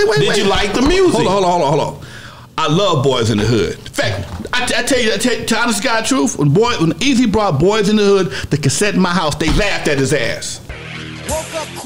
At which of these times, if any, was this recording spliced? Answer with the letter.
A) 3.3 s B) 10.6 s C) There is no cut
C